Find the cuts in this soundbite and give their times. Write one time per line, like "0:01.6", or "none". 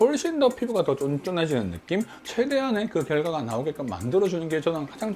0:02.2